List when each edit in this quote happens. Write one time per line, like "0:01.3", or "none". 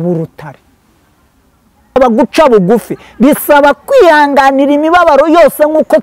0:02.0